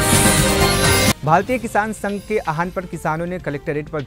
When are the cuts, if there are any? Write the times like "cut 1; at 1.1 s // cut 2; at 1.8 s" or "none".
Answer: cut 1; at 1.1 s